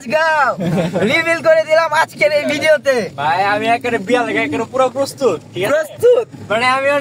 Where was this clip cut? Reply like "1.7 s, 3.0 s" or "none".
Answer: 3.1 s